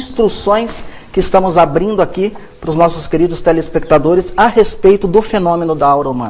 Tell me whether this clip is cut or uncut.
cut